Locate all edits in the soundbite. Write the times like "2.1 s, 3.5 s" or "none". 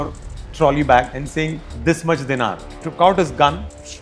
1.2 s, 2.6 s